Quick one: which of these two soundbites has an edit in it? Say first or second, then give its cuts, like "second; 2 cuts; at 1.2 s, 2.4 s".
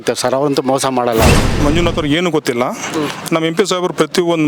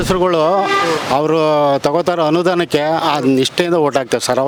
first; 1 cut; at 1.5 s